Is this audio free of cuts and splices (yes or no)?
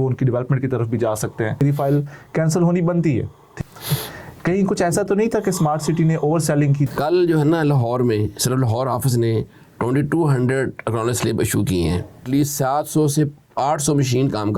no